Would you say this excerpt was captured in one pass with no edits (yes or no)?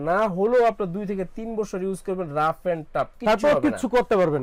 yes